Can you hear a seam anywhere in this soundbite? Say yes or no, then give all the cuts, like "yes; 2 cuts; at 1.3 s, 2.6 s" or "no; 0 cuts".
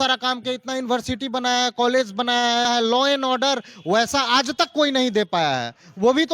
yes; 1 cut; at 2.7 s